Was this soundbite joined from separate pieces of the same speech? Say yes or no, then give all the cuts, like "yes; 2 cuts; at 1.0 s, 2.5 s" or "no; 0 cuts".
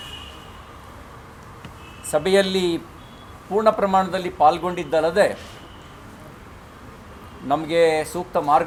no; 0 cuts